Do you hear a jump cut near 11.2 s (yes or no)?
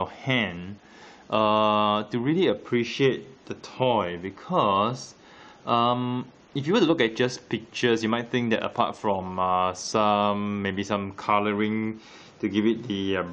no